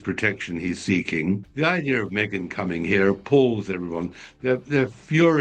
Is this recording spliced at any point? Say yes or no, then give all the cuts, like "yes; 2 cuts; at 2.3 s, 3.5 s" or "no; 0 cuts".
yes; 1 cut; at 1.5 s